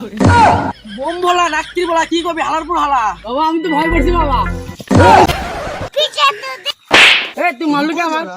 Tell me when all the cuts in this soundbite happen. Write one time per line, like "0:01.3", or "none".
0:05.3